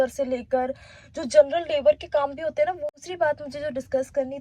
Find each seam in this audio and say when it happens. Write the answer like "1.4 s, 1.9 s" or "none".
2.9 s